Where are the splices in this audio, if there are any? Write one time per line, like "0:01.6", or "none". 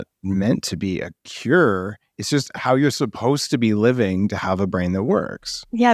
none

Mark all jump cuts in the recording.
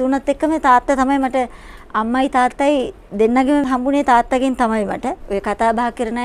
0:03.6
0:05.2

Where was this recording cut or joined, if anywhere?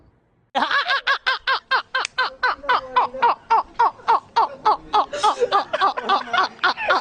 none

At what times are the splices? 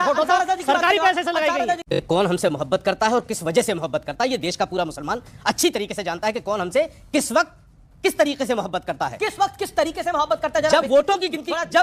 0:02.0

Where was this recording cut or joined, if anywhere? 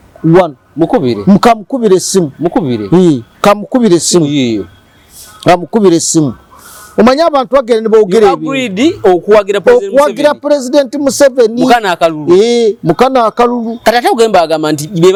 none

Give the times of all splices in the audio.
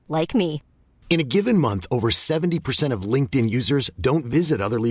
none

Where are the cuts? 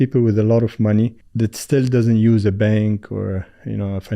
0:01.2

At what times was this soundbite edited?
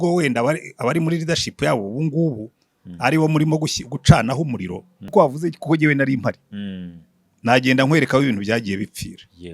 0:05.1

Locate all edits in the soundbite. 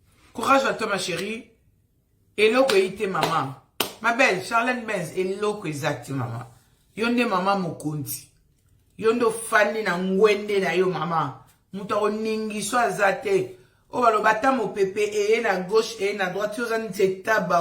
none

